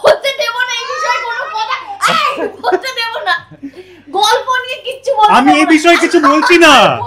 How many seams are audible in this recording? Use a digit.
0